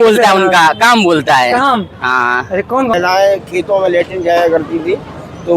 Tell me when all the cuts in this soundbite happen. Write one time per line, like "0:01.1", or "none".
0:02.9